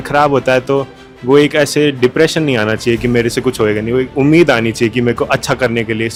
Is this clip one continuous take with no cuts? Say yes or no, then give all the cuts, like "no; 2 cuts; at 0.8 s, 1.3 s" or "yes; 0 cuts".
yes; 0 cuts